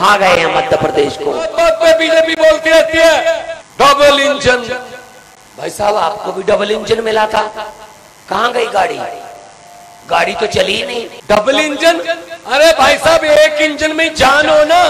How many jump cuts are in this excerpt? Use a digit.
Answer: 3